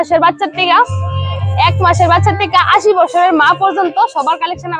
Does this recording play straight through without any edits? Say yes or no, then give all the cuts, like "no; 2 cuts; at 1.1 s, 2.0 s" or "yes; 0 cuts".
yes; 0 cuts